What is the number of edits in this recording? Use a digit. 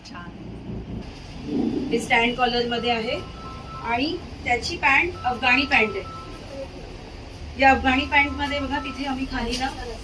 1